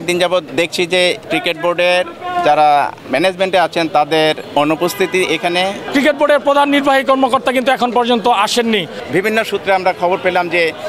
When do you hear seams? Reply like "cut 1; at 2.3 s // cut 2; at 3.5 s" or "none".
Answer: cut 1; at 1.0 s // cut 2; at 3.0 s // cut 3; at 4.4 s // cut 4; at 5.8 s // cut 5; at 9.0 s